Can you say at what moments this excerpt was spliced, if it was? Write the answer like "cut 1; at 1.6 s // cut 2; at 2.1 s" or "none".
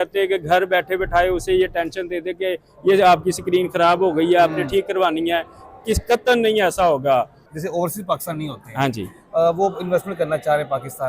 cut 1; at 7.4 s